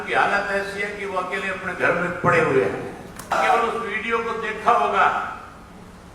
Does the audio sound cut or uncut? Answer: cut